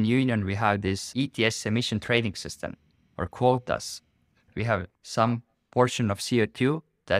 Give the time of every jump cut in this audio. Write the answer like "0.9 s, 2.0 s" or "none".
1.0 s, 4.6 s